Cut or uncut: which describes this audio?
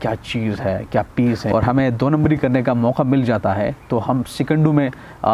cut